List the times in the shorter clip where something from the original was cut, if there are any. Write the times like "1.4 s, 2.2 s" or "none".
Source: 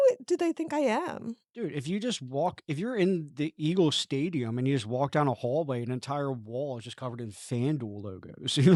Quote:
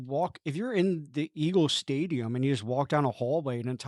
none

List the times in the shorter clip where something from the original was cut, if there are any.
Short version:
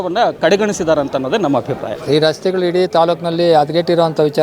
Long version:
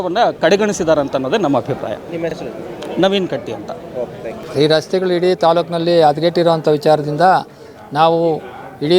1.9 s

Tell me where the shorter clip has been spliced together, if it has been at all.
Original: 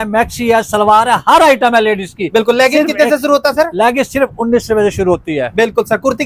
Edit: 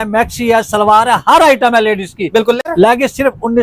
2.6 s

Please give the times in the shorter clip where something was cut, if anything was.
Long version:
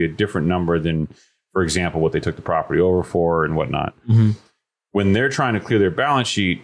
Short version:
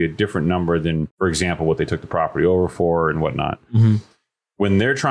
1.1 s

